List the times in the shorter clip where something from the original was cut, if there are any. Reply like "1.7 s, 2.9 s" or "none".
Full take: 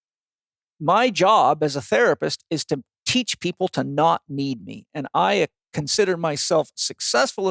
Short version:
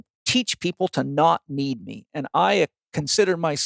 none